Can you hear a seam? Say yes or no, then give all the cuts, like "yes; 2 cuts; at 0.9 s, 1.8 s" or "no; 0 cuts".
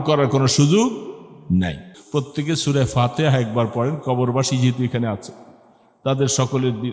yes; 1 cut; at 1.9 s